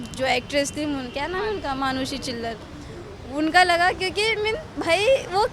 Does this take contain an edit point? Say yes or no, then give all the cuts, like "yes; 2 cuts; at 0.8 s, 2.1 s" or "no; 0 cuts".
no; 0 cuts